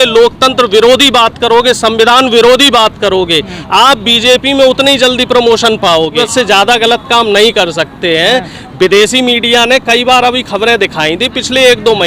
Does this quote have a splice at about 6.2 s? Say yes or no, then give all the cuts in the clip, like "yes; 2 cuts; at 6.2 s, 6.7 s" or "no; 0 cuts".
yes; 1 cut; at 6.2 s